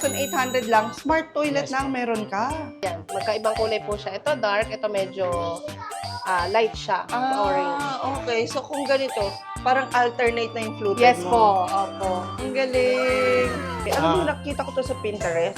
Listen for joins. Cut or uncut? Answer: cut